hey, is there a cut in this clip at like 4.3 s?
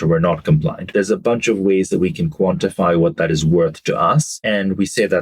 yes; 2 cuts; at 0.9 s, 4.3 s

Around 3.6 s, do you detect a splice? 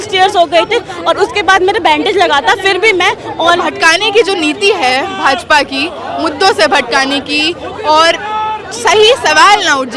yes; 1 cut; at 3.6 s

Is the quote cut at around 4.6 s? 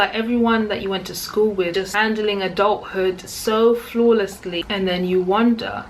yes; 2 cuts; at 1.8 s, 4.6 s

